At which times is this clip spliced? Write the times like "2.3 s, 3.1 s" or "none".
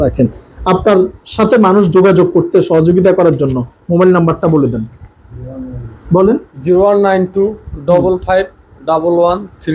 none